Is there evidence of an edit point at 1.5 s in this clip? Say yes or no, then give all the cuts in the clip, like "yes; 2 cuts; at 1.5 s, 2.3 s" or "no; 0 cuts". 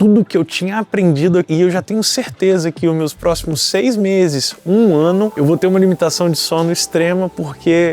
yes; 1 cut; at 1.5 s